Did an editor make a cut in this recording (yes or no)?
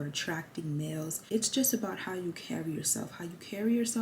yes